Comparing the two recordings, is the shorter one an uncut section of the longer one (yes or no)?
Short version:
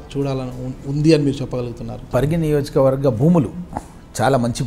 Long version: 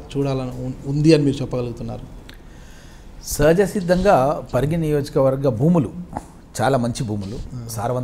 no